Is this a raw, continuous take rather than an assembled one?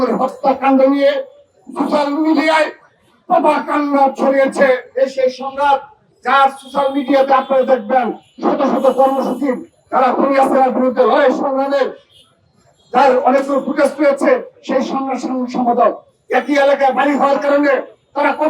no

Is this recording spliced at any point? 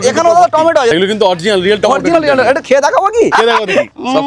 yes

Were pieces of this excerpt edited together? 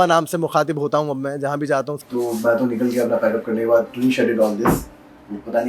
yes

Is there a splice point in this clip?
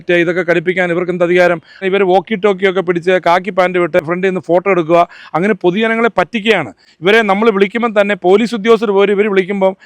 yes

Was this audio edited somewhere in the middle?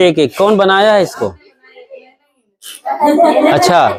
no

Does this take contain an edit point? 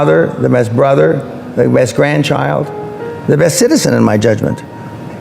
no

